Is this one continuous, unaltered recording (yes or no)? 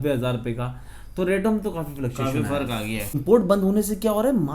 no